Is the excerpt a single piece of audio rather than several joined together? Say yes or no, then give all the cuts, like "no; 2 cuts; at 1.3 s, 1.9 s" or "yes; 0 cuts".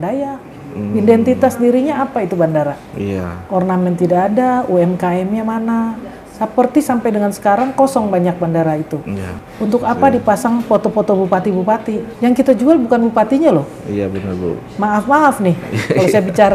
no; 2 cuts; at 9.4 s, 12.1 s